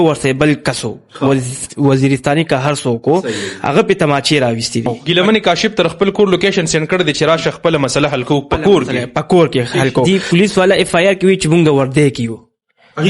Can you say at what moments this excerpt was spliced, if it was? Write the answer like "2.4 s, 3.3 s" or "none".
5.0 s, 10.1 s